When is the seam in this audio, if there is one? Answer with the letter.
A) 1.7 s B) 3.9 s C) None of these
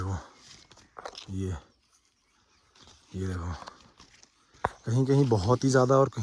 C